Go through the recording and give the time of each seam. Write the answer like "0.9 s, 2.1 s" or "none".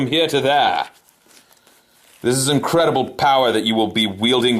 2.3 s